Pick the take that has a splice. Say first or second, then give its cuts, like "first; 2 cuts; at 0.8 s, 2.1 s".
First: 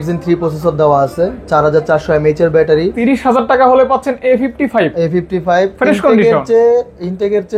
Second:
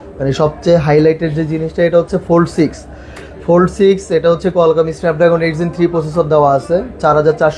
first; 1 cut; at 3.0 s